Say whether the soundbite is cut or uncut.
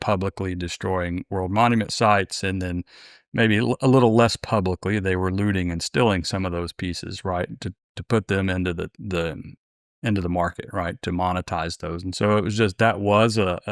uncut